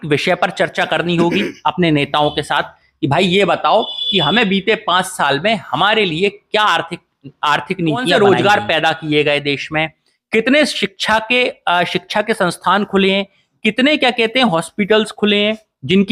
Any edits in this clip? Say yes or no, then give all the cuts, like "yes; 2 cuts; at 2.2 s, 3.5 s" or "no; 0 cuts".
yes; 1 cut; at 8.1 s